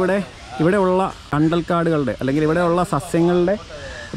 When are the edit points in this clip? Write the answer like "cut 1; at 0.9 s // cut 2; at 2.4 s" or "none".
cut 1; at 1.2 s